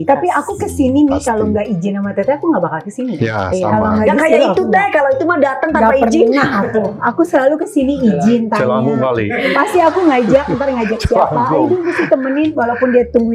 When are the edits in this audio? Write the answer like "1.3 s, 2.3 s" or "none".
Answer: none